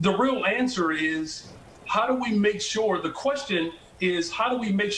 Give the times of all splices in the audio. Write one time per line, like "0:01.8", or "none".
none